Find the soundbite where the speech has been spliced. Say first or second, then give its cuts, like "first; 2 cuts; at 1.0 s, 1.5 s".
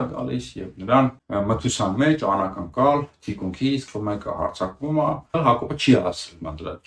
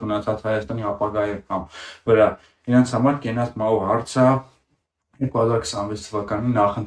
first; 3 cuts; at 1.2 s, 3.8 s, 5.3 s